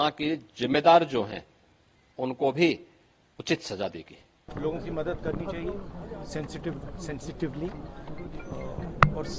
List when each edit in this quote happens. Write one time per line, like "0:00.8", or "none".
0:04.5